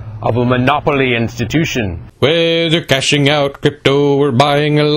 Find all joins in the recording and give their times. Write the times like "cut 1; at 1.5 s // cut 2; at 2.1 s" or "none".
cut 1; at 2.0 s